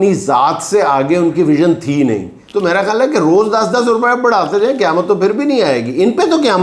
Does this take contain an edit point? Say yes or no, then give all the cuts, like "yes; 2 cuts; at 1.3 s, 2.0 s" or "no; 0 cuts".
yes; 1 cut; at 2.4 s